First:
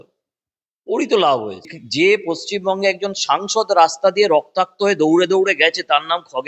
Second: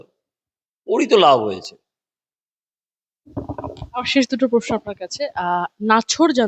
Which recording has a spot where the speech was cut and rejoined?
first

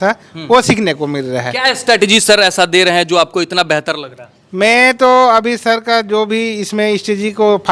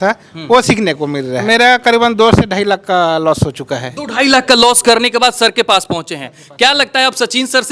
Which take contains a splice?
second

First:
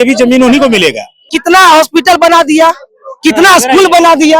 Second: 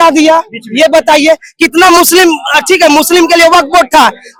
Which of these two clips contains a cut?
first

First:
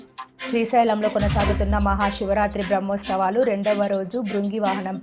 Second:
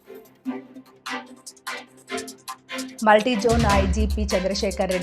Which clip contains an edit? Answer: second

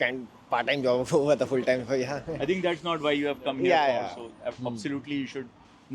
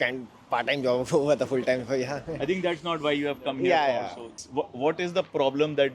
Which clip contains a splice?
second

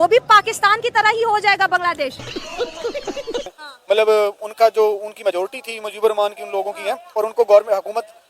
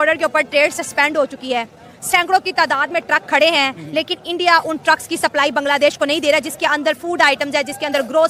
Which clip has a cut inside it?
first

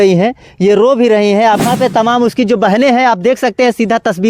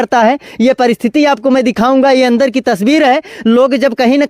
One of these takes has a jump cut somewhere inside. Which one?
first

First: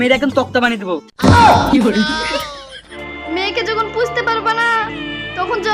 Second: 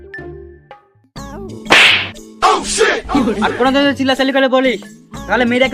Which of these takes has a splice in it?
first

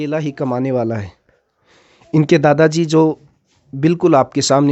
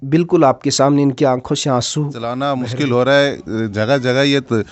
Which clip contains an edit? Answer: second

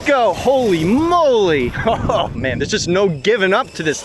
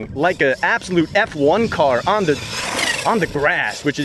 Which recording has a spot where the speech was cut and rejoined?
first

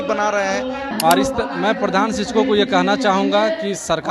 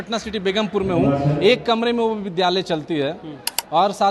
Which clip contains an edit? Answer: first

